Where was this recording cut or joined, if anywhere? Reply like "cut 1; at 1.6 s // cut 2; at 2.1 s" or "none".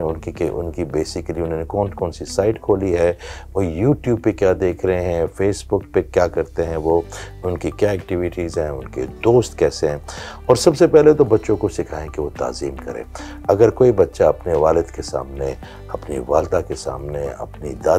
none